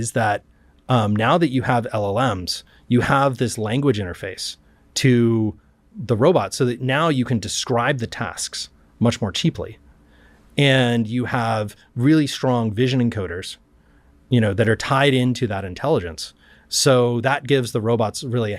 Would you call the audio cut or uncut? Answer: uncut